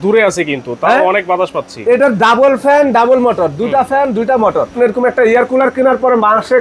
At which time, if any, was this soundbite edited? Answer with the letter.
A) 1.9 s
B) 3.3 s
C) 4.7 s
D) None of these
C